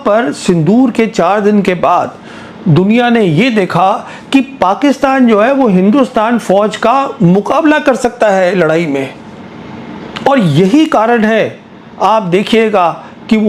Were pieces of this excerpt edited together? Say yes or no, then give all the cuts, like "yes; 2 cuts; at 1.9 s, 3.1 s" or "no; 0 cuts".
no; 0 cuts